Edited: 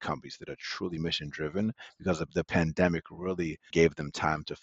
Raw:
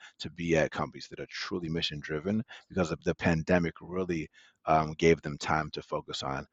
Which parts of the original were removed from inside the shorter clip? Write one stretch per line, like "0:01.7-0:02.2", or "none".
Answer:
0:04.4-0:04.9